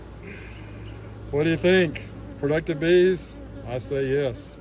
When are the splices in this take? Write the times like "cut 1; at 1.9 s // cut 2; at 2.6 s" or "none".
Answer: none